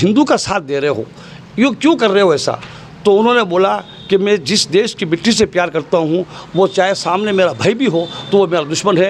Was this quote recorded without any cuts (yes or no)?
yes